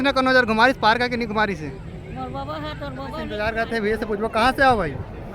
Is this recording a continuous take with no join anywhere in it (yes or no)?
no